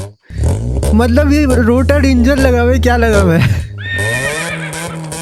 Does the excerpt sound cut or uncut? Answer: uncut